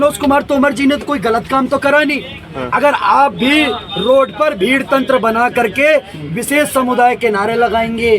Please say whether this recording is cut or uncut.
uncut